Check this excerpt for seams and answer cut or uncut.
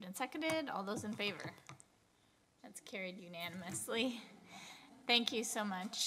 uncut